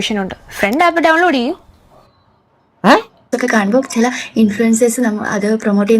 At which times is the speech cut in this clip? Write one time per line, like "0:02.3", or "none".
0:03.3